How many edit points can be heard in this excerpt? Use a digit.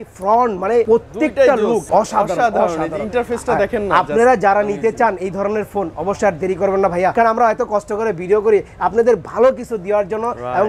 3